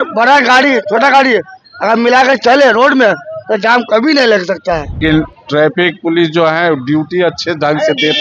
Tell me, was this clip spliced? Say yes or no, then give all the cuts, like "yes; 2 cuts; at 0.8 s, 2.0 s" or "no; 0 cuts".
yes; 1 cut; at 5.0 s